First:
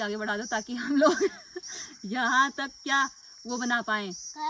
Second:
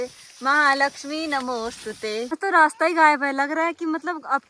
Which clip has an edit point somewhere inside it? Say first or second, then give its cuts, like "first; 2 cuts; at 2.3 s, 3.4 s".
second; 1 cut; at 2.4 s